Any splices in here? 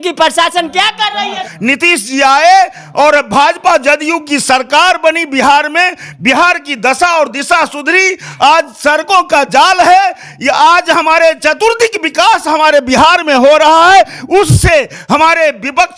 yes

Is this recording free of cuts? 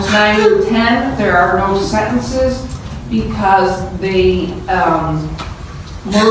yes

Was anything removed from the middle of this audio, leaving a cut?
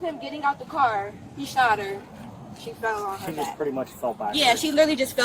no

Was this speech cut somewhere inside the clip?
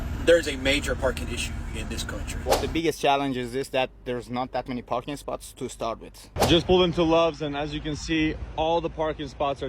yes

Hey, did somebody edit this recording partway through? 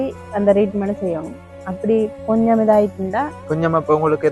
no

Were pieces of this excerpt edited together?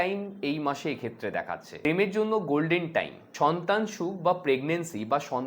yes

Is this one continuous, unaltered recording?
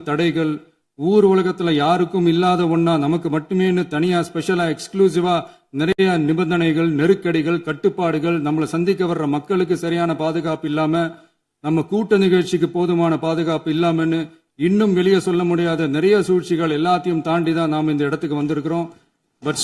yes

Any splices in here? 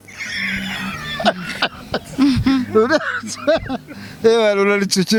no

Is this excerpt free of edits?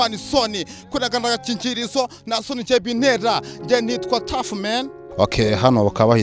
no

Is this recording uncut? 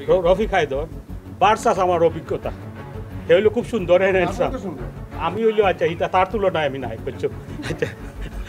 yes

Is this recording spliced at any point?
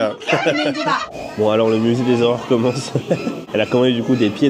yes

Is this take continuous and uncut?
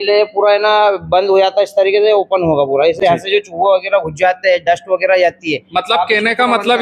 yes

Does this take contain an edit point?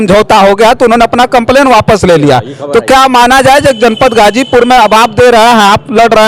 no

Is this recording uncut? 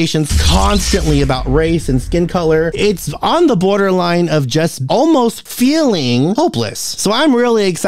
yes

